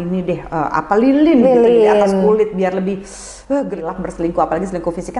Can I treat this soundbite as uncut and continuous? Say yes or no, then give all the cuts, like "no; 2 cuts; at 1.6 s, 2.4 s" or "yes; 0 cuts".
no; 1 cut; at 3.8 s